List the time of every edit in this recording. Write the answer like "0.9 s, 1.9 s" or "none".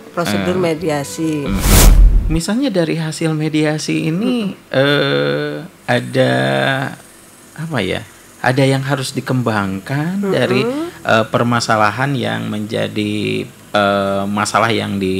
1.9 s